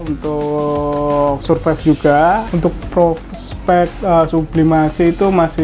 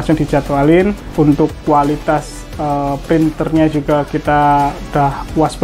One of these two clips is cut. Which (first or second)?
first